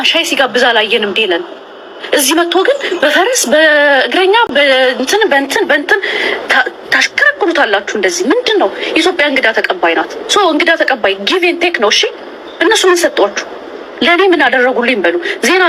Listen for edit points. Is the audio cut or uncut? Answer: uncut